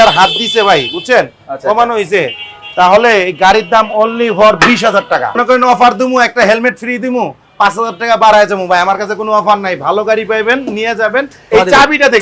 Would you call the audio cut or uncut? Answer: cut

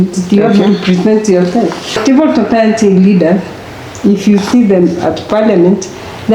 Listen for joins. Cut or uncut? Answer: cut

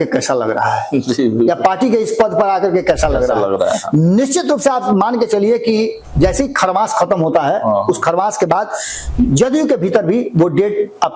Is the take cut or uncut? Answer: uncut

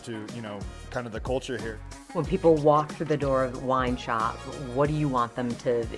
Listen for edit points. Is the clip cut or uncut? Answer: cut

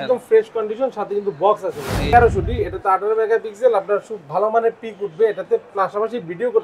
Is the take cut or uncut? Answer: cut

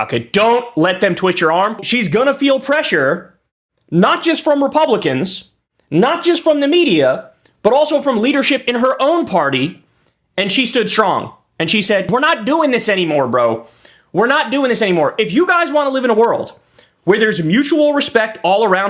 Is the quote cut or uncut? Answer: cut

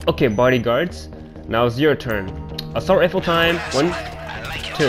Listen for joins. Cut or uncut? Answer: uncut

